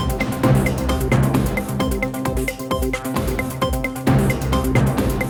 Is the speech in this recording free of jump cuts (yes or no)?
yes